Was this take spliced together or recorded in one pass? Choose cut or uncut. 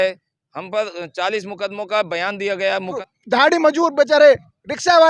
cut